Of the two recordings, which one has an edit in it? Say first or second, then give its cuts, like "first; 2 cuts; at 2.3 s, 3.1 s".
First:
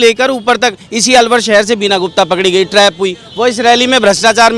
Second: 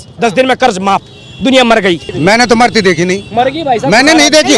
second; 1 cut; at 2.1 s